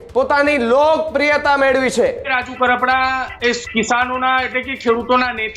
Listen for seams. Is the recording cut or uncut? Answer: cut